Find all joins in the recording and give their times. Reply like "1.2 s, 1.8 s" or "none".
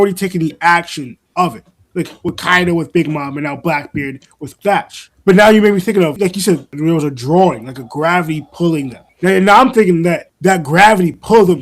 none

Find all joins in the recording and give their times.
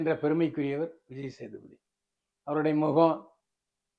none

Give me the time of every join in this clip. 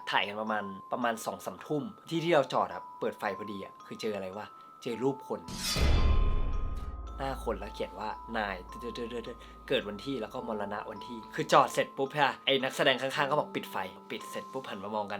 11.2 s, 12.4 s, 14.1 s

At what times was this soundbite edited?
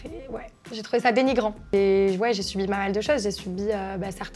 1.7 s

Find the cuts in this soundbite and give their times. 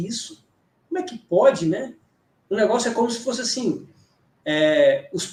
none

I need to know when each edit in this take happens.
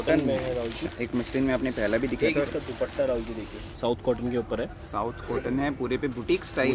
3.6 s

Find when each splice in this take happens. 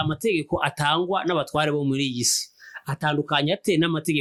none

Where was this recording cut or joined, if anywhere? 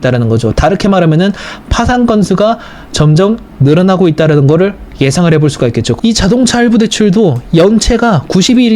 5.9 s

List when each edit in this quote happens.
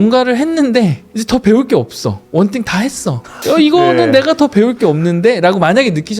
1.1 s, 2.2 s, 3.3 s

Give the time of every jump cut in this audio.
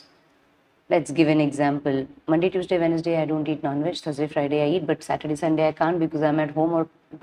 none

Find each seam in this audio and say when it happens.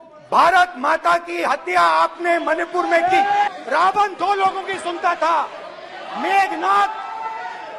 3.5 s

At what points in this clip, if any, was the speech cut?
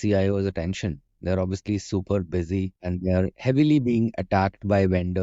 none

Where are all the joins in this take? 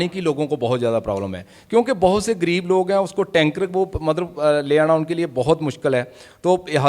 none

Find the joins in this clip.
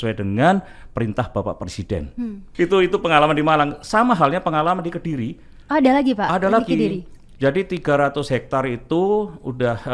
none

